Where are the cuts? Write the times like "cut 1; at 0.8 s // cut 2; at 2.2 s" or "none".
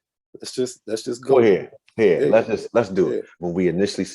cut 1; at 3.3 s